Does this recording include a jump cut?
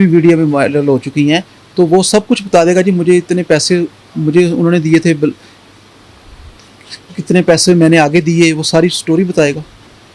no; 0 cuts

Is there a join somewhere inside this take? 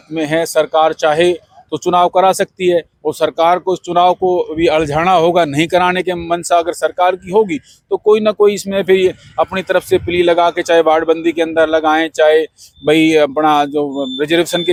no; 0 cuts

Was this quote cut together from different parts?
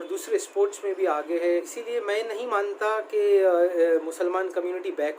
yes; 1 cut; at 1.5 s

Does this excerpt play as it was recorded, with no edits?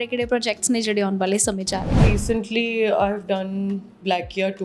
no; 1 cut; at 2.0 s

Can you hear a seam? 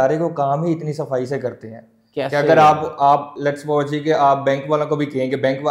no; 0 cuts

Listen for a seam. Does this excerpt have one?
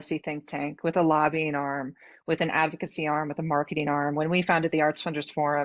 no; 0 cuts

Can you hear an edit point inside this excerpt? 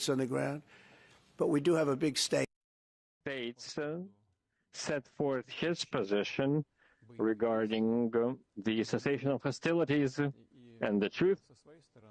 yes; 1 cut; at 3.3 s

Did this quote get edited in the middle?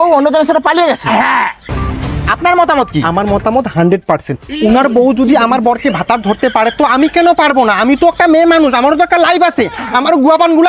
yes; 1 cut; at 1.6 s

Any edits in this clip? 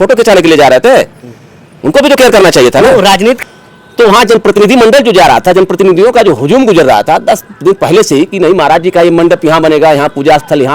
yes; 1 cut; at 3.4 s

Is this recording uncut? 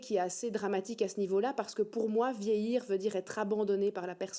yes; 0 cuts

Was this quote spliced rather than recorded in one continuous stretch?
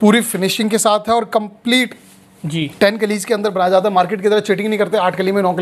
no; 0 cuts

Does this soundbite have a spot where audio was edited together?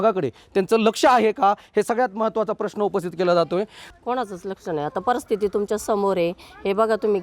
yes; 1 cut; at 3.8 s

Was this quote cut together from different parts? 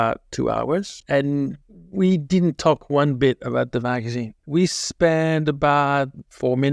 no; 0 cuts

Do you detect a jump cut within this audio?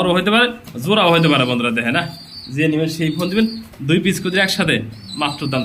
no; 0 cuts

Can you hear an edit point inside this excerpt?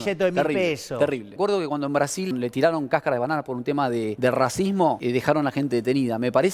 yes; 4 cuts; at 1.3 s, 2.3 s, 4.1 s, 5.0 s

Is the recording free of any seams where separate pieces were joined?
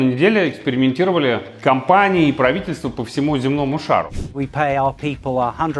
no; 2 cuts; at 1.5 s, 4.2 s

